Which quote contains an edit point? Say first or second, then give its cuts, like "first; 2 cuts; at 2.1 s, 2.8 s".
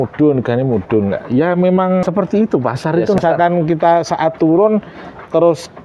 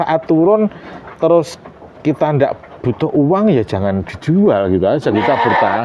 first; 2 cuts; at 2.0 s, 3.2 s